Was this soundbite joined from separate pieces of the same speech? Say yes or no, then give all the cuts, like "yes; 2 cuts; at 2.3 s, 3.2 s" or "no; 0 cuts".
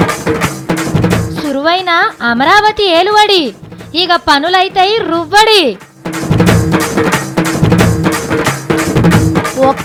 no; 0 cuts